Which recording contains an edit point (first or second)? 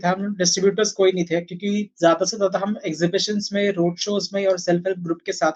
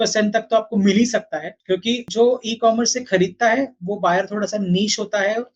second